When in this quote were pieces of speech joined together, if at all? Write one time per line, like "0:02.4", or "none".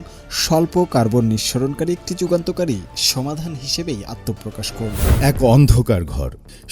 0:05.1

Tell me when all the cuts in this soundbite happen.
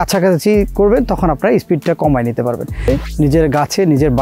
0:02.9

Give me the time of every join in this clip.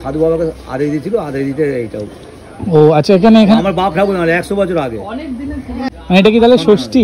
0:05.9

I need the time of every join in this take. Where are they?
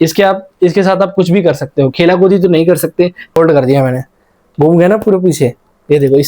0:03.3

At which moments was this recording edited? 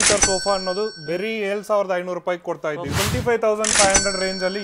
0:02.9

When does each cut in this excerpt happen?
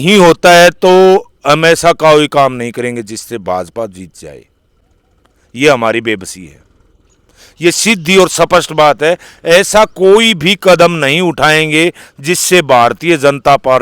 none

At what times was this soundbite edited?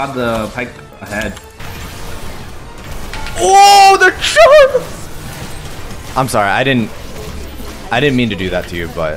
0:01.5

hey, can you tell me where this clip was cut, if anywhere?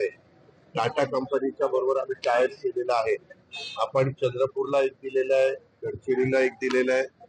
0:04.1

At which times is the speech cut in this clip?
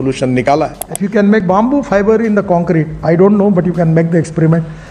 0:01.4

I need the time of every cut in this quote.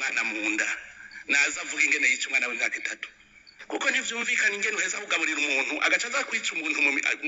0:03.8

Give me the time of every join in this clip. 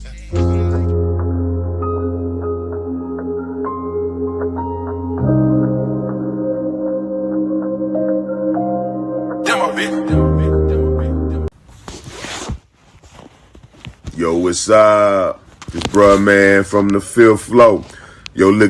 0:11.5

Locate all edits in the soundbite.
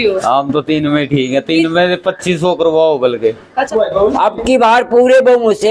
0:03.7

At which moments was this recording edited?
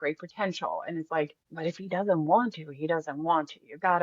0:01.4

